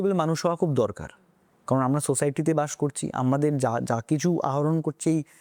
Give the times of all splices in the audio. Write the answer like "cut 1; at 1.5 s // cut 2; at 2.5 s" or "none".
none